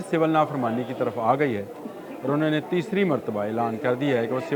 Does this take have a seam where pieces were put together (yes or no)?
no